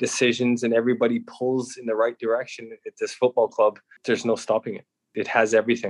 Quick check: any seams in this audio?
yes; 2 cuts; at 3.9 s, 5.0 s

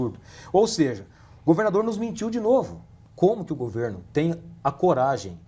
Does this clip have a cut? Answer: yes; 1 cut; at 3.0 s

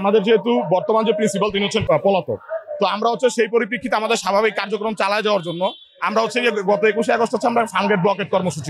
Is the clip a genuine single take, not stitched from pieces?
yes; 0 cuts

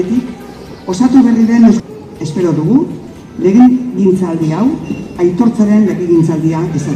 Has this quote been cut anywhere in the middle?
yes; 1 cut; at 1.8 s

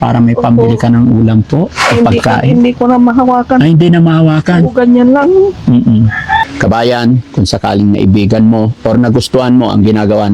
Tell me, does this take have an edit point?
yes; 1 cut; at 6.5 s

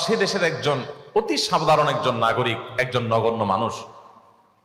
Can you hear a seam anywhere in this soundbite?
no; 0 cuts

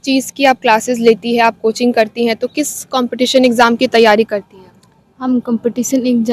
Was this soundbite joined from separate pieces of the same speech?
no; 0 cuts

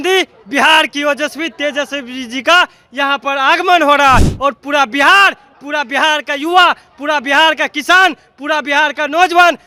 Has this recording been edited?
no; 0 cuts

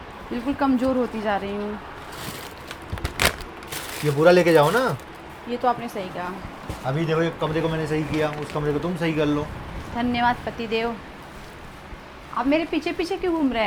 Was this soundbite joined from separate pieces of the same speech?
no; 0 cuts

